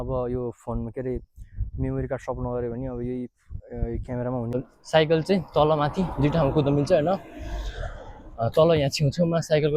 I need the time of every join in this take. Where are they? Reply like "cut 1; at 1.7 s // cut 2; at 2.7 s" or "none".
cut 1; at 4.6 s